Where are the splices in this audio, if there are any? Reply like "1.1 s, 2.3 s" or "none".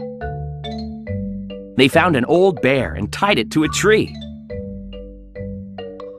1.0 s